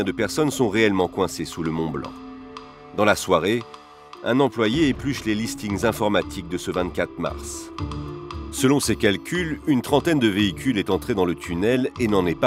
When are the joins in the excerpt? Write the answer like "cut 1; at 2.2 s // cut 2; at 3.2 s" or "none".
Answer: none